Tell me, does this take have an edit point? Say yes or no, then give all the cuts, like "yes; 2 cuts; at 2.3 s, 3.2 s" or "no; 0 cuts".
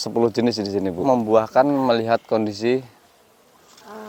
yes; 1 cut; at 1.0 s